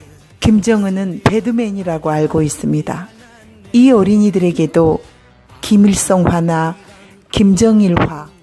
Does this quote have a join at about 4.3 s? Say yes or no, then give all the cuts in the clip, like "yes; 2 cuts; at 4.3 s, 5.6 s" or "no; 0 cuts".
yes; 1 cut; at 4.3 s